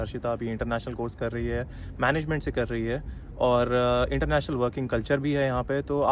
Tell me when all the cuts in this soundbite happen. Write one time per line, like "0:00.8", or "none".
none